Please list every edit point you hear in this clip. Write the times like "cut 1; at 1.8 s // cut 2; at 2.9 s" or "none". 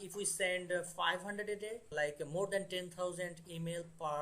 cut 1; at 1.9 s